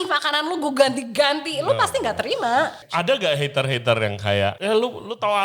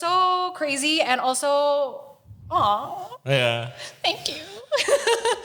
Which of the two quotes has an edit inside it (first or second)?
first